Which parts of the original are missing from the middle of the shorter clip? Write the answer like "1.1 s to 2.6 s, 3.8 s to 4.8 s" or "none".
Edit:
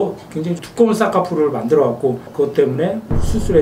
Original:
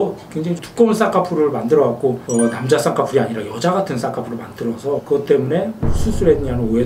2.3 s to 5.0 s

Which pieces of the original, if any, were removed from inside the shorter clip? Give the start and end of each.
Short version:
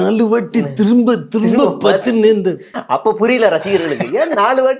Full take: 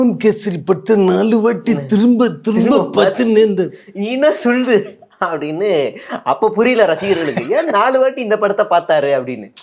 3.8 s to 6.1 s

